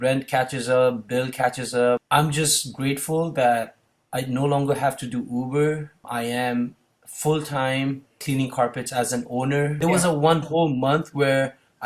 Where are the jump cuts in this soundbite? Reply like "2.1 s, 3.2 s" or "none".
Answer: 2.0 s, 6.1 s, 8.2 s, 9.8 s